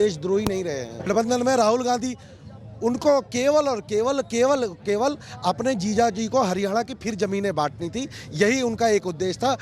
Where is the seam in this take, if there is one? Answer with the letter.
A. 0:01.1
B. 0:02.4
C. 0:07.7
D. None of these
A